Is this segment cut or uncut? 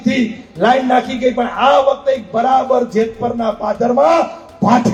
uncut